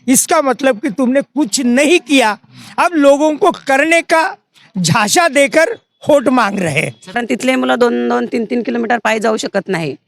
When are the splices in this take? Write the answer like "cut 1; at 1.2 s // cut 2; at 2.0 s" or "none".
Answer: cut 1; at 7.1 s